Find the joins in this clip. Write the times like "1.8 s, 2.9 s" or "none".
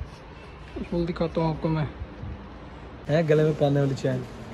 2.9 s